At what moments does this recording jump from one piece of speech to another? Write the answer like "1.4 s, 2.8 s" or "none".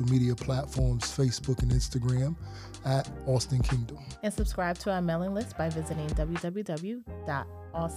none